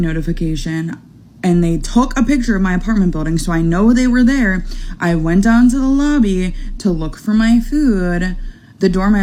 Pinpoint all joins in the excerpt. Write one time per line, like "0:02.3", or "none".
none